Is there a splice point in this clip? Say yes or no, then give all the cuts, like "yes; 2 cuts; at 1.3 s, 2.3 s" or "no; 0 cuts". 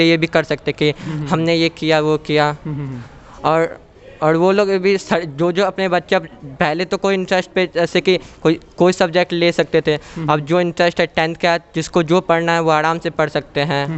no; 0 cuts